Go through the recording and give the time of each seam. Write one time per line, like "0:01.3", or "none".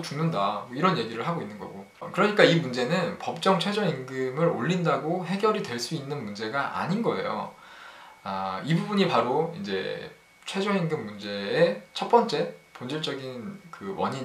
none